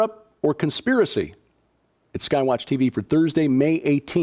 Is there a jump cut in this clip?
no; 0 cuts

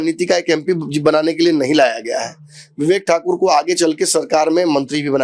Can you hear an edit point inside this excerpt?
no; 0 cuts

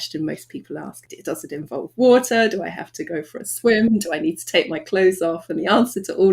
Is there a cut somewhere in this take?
yes; 1 cut; at 1.0 s

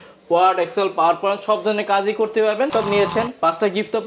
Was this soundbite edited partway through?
yes; 1 cut; at 2.7 s

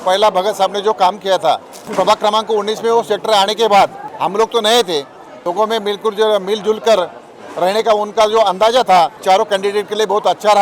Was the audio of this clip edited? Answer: yes; 4 cuts; at 1.8 s, 4.0 s, 5.3 s, 9.2 s

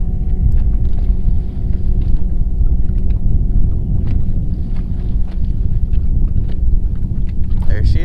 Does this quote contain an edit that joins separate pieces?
no; 0 cuts

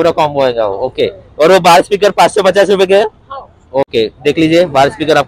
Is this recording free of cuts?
yes; 0 cuts

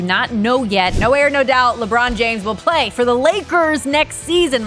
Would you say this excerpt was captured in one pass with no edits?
no; 1 cut; at 1.0 s

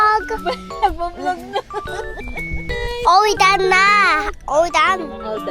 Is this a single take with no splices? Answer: no; 1 cut; at 2.7 s

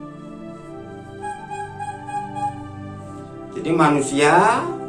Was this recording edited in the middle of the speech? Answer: no; 0 cuts

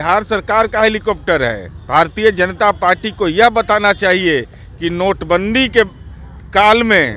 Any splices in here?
yes; 1 cut; at 1.7 s

